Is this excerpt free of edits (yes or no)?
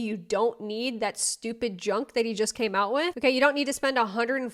yes